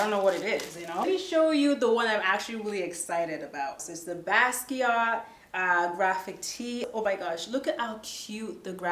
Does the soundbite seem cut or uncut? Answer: cut